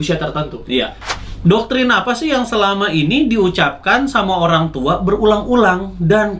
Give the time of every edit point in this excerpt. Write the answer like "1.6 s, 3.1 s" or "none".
1.0 s